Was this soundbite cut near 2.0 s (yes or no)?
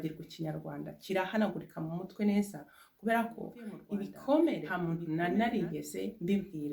no